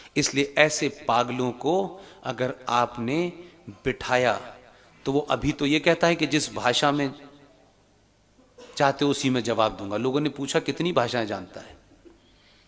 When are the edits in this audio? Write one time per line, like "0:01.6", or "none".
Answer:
none